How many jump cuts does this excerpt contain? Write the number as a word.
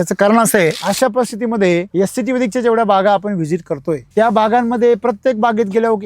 three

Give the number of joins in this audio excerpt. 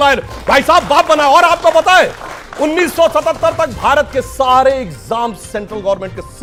zero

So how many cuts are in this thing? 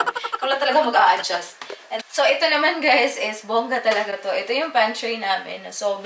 zero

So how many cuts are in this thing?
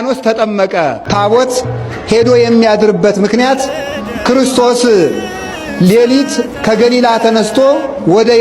one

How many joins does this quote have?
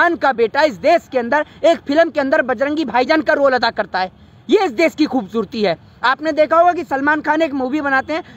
zero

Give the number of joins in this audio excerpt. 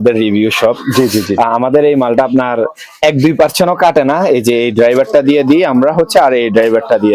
zero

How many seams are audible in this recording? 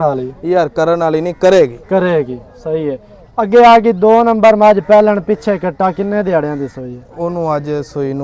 zero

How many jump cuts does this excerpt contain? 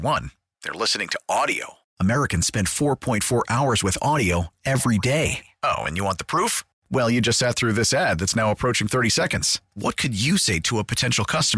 zero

